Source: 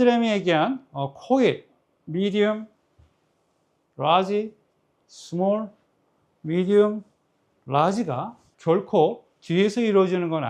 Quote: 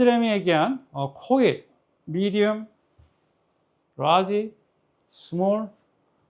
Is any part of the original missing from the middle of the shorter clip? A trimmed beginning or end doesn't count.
no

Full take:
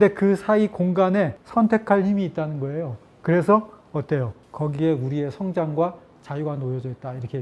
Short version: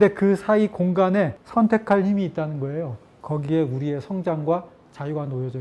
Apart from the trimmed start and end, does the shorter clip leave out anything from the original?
yes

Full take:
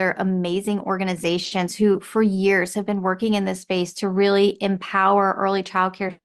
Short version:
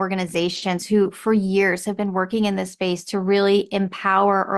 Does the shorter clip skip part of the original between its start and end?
no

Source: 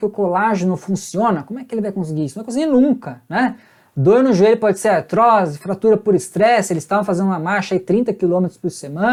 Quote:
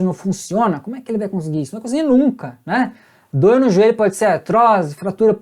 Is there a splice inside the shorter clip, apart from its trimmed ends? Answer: no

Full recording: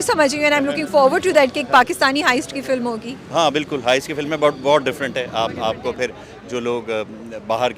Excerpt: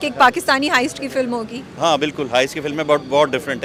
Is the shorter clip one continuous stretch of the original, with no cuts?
yes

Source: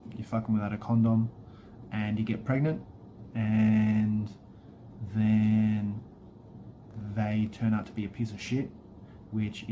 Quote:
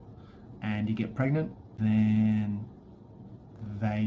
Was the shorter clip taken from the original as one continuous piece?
no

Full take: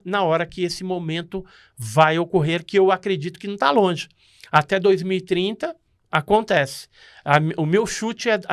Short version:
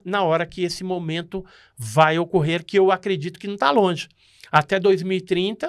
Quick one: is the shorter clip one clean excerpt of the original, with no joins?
yes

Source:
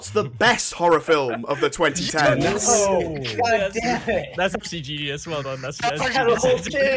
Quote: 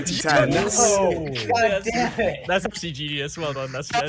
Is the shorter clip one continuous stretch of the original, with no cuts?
yes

